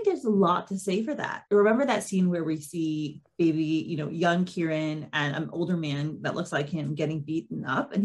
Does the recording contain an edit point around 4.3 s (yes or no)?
no